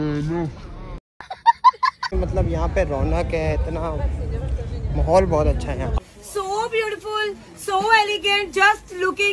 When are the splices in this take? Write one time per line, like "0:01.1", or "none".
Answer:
0:02.1

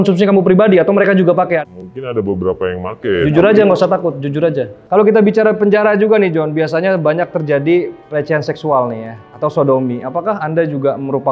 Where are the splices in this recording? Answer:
0:01.6
0:04.7

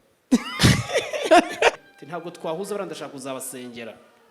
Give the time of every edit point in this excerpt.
0:01.8

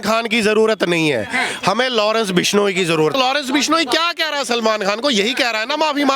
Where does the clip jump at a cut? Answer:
0:03.1

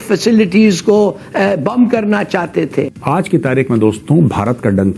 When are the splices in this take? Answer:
0:03.0

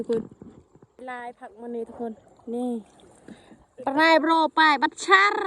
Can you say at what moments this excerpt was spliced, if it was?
0:00.9

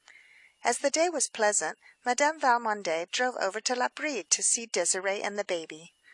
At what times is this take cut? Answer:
0:02.0

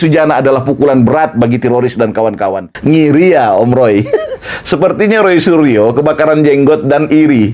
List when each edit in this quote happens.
0:02.7

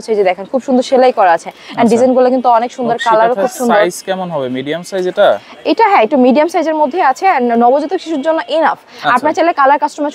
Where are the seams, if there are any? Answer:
none

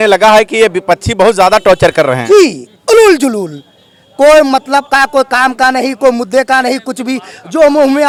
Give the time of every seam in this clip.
none

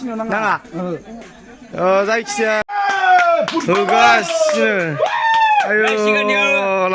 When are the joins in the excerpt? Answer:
0:02.6

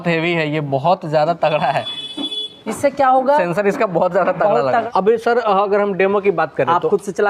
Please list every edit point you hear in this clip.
0:04.7

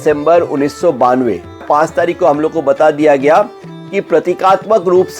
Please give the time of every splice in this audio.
0:01.6

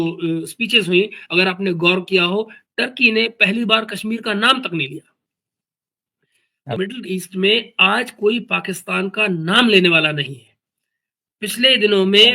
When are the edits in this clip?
0:06.8

